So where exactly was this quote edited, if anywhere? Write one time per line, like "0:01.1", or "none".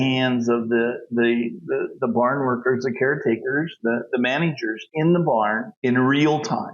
0:05.7